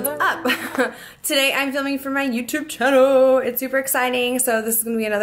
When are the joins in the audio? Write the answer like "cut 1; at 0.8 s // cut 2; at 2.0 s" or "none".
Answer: none

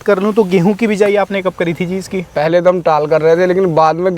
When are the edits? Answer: cut 1; at 2.2 s

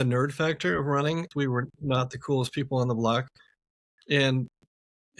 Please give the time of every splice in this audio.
cut 1; at 1.3 s

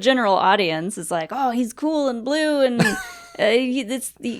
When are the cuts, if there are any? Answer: none

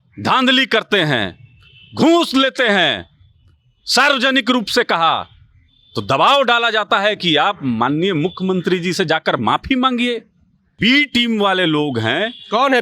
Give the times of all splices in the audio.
cut 1; at 10.8 s

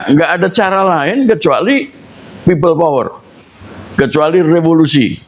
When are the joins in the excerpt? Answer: none

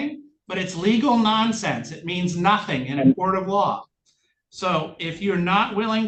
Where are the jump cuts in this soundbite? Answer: none

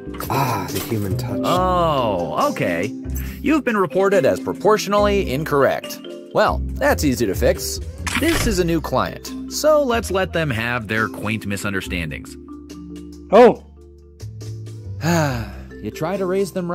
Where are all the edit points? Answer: cut 1; at 1.2 s

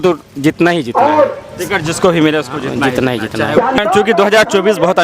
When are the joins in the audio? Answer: cut 1; at 3.8 s

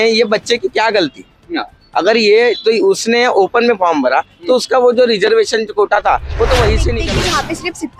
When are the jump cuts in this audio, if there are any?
cut 1; at 7.0 s

